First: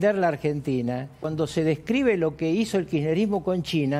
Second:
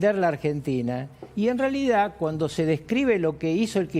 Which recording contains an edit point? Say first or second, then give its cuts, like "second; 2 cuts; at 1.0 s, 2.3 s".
first; 1 cut; at 1.2 s